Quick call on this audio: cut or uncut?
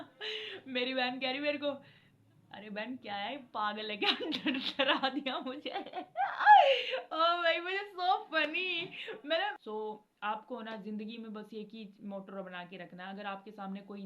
cut